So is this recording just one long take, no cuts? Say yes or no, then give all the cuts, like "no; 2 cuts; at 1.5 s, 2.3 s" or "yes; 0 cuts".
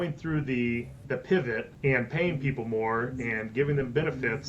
no; 2 cuts; at 0.9 s, 1.7 s